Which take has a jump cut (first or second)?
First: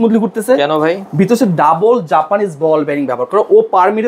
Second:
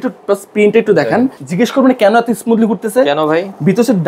second